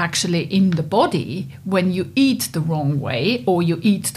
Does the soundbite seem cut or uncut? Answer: uncut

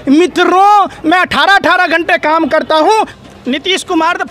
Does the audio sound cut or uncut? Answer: cut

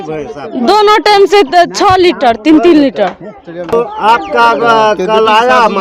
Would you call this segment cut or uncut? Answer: uncut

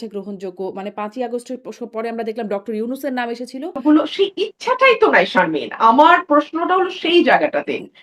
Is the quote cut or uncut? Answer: cut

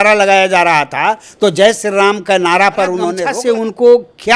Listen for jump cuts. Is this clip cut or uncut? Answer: cut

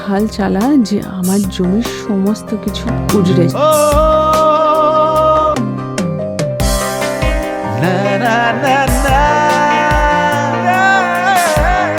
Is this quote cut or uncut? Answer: cut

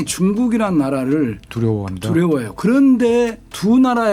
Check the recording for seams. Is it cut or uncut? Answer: uncut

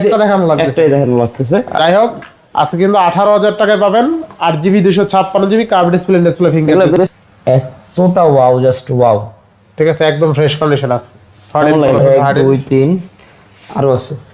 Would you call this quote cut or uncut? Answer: cut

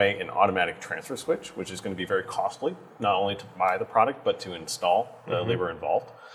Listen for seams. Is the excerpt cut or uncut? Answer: uncut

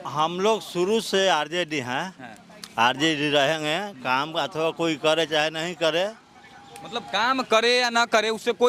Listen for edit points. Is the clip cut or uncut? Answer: uncut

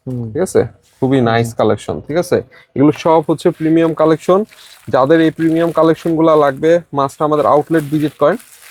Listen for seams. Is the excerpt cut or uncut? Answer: uncut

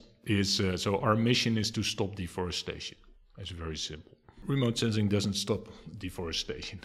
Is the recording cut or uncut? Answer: cut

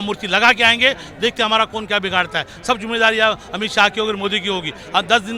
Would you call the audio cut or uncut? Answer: uncut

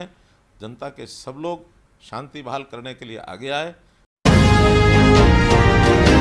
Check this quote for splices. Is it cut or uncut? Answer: cut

